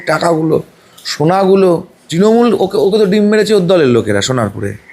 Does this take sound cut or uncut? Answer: cut